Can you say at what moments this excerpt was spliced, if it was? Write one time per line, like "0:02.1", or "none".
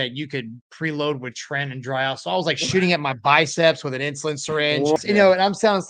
0:05.0